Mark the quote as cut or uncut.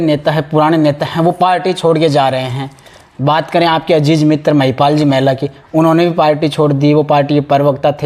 uncut